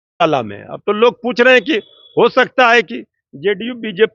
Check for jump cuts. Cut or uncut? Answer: uncut